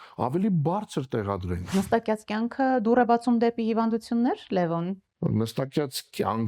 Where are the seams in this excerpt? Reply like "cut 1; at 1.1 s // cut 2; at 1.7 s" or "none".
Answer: cut 1; at 1.6 s // cut 2; at 5.1 s